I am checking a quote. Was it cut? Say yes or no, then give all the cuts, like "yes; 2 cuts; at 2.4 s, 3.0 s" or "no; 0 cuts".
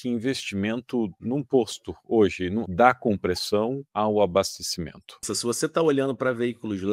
yes; 4 cuts; at 1.2 s, 2.6 s, 3.8 s, 5.3 s